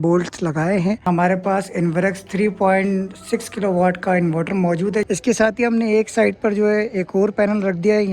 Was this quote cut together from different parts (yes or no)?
yes